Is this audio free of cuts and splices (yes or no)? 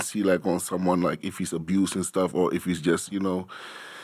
yes